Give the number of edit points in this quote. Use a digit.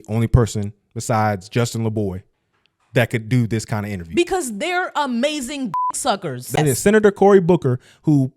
1